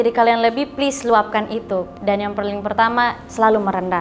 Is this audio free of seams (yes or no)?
no